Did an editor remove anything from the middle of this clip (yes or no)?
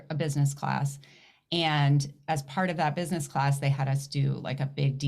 no